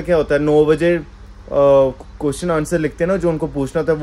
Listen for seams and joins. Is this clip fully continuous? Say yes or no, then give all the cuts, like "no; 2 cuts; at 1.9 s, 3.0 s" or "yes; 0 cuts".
yes; 0 cuts